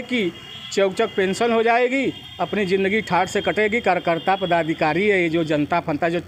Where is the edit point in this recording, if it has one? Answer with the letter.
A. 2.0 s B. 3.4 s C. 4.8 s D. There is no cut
D